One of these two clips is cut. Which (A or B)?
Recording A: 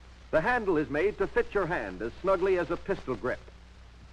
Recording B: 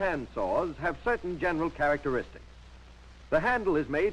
A